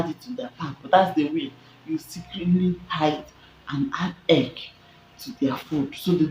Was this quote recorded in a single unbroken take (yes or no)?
yes